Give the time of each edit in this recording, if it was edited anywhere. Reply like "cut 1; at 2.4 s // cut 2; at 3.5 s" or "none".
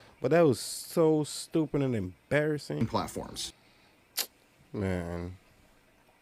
cut 1; at 2.8 s